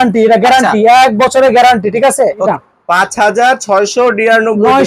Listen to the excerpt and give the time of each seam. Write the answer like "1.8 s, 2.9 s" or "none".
2.5 s

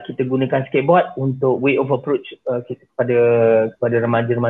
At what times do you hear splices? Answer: none

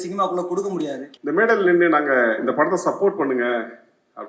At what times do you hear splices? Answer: 1.1 s

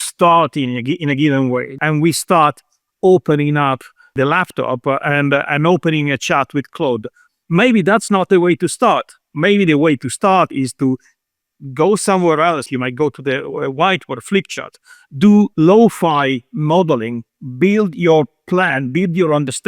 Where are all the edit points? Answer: 1.8 s, 4.1 s, 12.7 s, 15.5 s

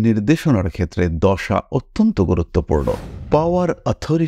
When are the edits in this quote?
3.1 s

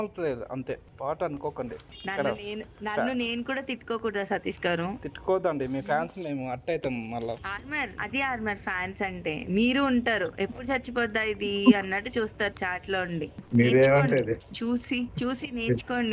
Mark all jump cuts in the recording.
none

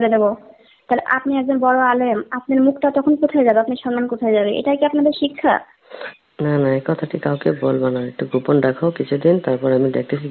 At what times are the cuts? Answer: none

